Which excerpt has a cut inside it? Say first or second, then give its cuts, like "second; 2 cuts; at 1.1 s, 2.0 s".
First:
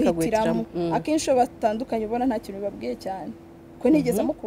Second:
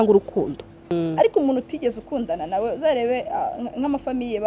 second; 1 cut; at 0.9 s